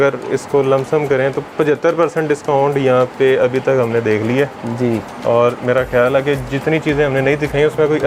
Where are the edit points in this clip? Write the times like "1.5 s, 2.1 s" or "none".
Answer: none